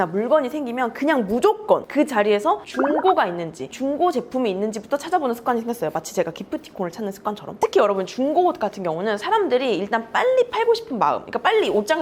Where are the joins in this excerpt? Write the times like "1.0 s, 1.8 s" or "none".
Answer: none